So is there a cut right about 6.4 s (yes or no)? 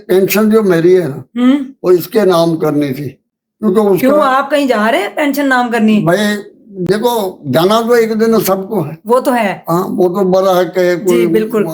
no